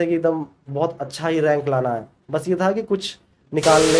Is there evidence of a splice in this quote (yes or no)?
no